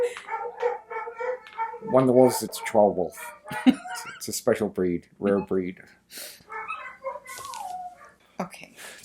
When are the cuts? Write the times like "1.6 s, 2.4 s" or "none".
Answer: 2.5 s, 8.0 s